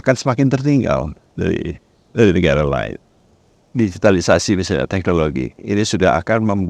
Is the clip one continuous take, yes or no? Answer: no